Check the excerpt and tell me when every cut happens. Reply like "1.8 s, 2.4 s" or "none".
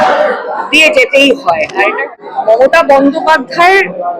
2.0 s